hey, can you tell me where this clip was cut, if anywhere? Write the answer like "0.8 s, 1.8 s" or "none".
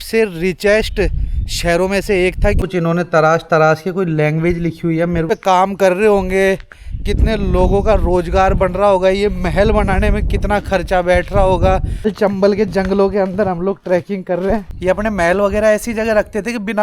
2.6 s, 5.3 s, 12.1 s, 14.7 s